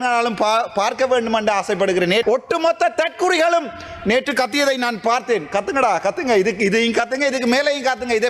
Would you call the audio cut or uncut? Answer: cut